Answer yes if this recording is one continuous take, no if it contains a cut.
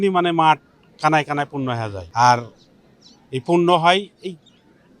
no